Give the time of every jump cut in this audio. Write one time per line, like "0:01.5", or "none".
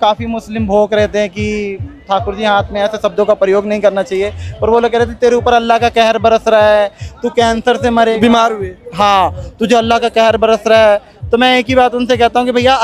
none